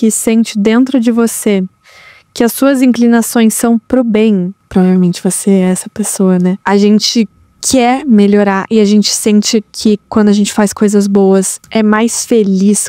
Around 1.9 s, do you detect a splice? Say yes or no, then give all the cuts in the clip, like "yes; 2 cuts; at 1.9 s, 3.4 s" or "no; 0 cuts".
no; 3 cuts; at 4.6 s, 6.6 s, 11.6 s